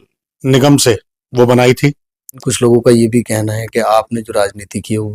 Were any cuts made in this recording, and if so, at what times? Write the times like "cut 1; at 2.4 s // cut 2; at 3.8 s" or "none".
cut 1; at 2.4 s